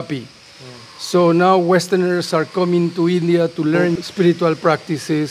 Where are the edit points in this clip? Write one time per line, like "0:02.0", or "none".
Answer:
0:04.0